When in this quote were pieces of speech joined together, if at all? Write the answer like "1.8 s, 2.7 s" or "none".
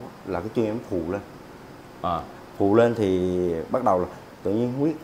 none